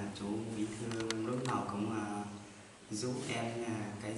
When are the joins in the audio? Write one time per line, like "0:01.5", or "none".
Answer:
none